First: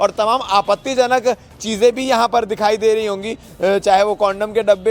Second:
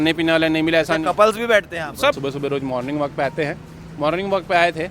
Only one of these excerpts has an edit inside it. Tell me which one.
second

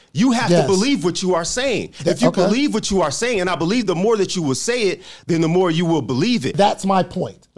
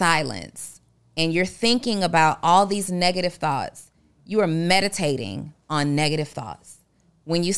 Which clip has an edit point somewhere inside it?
first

